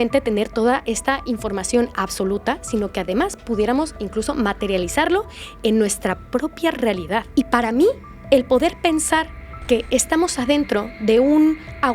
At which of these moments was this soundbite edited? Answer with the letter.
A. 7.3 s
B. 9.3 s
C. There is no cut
A